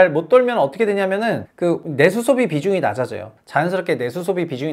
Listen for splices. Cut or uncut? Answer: cut